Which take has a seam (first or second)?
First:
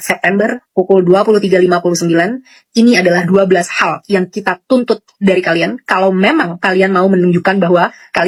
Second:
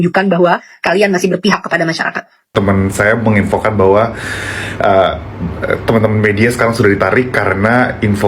second